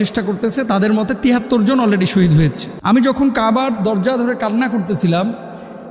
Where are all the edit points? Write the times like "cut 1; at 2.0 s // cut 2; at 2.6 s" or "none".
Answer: cut 1; at 2.7 s